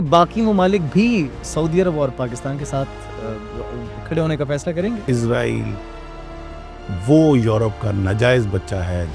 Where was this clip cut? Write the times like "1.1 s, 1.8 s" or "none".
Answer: 5.0 s

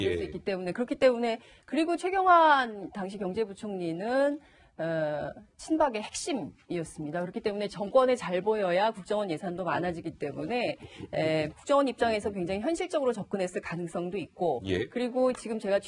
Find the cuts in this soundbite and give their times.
14.9 s

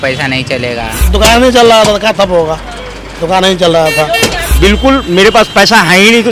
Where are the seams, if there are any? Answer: 1.0 s, 4.4 s

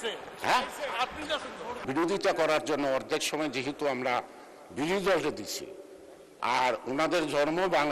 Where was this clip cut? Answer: 1.8 s

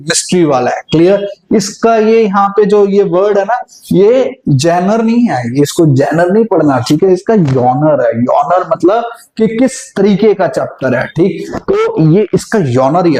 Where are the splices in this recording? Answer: none

